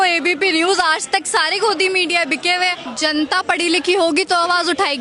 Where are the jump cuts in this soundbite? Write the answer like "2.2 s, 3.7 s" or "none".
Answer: 2.8 s